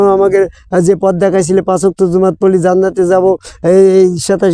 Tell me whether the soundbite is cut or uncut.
uncut